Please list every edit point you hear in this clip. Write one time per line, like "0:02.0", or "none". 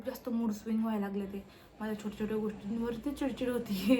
none